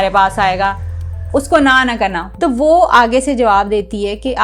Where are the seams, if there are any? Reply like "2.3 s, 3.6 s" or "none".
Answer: 2.2 s